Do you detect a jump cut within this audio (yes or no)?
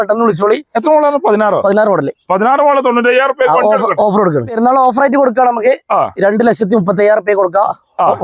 yes